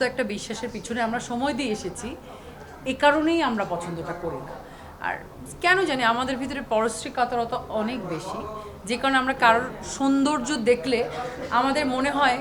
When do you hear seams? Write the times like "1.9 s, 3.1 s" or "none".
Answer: none